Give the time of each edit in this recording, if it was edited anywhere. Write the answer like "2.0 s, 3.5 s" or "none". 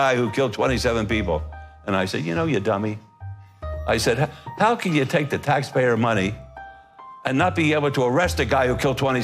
none

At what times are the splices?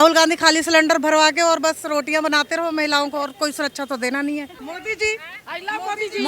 4.6 s

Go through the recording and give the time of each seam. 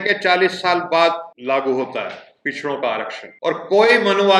1.3 s, 3.2 s

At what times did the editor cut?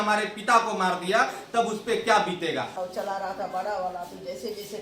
2.8 s

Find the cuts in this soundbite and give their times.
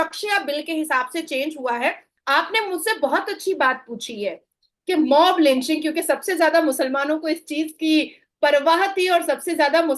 2.1 s

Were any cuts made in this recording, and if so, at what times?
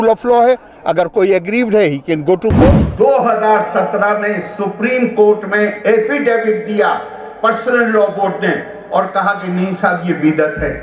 2.8 s

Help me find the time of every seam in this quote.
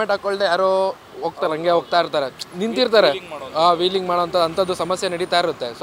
none

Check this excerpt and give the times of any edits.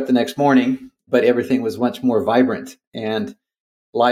none

